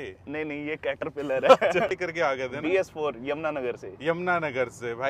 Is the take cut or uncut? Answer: cut